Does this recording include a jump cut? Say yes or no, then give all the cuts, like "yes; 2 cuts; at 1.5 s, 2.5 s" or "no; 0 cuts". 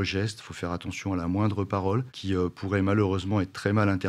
no; 0 cuts